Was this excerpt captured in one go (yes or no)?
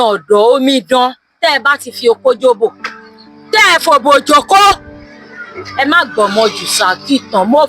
no